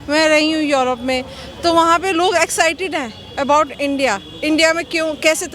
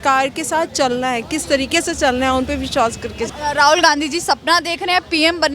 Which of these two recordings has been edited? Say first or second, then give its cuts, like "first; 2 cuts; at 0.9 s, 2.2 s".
second; 1 cut; at 3.3 s